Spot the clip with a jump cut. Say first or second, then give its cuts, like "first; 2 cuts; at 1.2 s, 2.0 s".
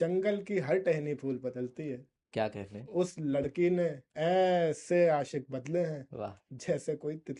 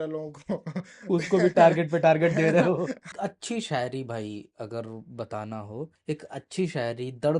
second; 1 cut; at 3.1 s